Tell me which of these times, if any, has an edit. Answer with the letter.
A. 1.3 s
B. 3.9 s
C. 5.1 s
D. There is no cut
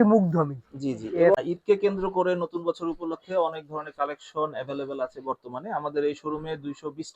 A